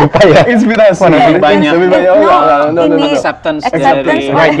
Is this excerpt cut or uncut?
uncut